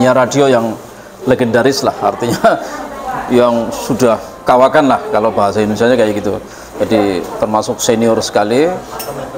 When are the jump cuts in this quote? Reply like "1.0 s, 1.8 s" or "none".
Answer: none